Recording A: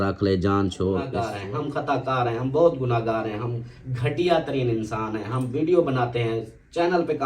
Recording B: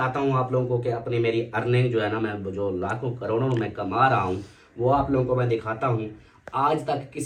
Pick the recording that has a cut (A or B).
A